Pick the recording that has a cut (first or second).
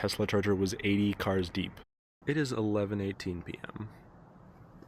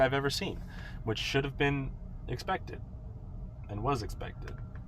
first